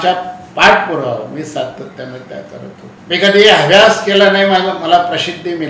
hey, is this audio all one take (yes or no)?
no